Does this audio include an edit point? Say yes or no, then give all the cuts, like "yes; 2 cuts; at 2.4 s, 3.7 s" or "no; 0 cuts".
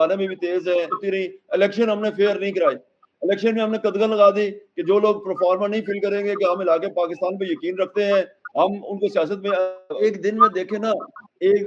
yes; 2 cuts; at 1.0 s, 10.0 s